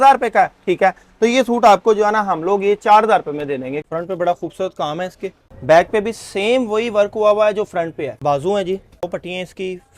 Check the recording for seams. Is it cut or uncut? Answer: cut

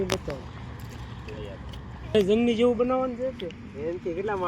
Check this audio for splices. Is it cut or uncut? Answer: cut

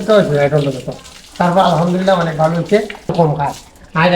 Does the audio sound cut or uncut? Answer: cut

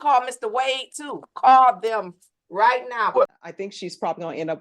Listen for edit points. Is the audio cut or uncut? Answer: cut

